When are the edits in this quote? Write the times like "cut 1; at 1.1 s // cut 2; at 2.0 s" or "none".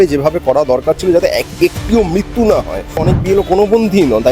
cut 1; at 3.0 s